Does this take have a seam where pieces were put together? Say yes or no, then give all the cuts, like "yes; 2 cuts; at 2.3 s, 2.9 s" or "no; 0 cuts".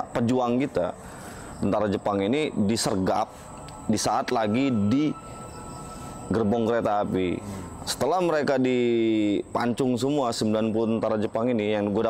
no; 0 cuts